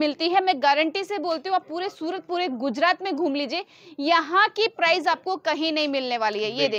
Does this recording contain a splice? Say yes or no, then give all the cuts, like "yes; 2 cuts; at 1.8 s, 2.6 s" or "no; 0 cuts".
no; 0 cuts